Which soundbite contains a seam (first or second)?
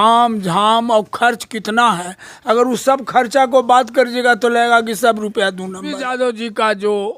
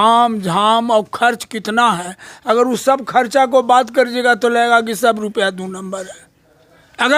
first